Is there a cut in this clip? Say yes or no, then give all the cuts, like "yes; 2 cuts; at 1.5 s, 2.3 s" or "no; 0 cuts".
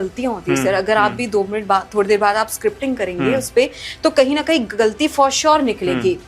no; 0 cuts